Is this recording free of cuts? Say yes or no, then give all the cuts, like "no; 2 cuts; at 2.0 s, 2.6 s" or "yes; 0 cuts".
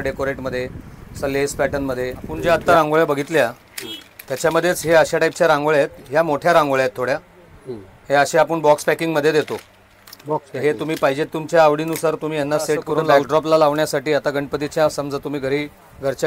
no; 2 cuts; at 2.3 s, 13.2 s